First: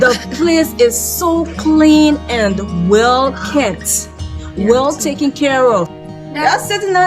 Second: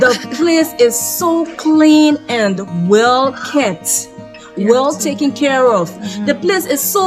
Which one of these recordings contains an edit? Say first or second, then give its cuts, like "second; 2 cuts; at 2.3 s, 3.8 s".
first; 1 cut; at 6.0 s